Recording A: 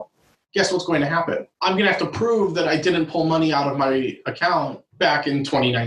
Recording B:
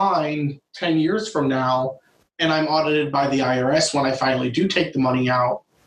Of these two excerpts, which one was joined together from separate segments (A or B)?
A